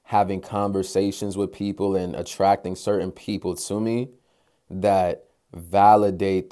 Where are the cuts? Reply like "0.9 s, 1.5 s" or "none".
none